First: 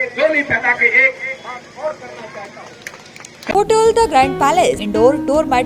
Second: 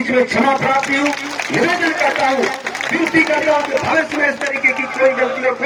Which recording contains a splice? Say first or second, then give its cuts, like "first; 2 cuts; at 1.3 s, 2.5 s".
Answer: first; 2 cuts; at 3.5 s, 4.9 s